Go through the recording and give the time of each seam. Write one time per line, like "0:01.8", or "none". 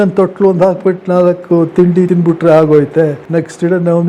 0:02.1
0:03.2